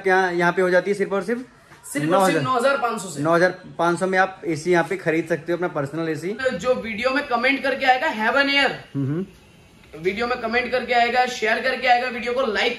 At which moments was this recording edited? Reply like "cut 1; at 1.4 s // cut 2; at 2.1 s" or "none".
cut 1; at 6.4 s